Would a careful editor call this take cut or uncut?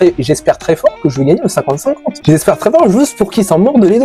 cut